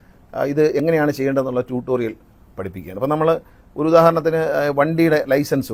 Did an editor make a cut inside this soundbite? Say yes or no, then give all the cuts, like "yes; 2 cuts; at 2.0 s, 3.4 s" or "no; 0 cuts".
no; 0 cuts